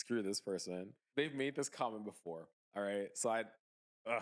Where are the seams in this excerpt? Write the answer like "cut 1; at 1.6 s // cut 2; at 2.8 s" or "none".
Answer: cut 1; at 1.0 s